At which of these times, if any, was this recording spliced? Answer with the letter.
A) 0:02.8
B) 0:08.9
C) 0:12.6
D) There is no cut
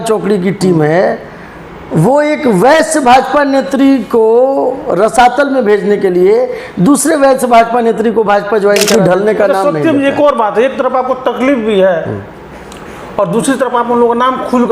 B